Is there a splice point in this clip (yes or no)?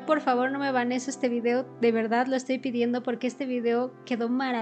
no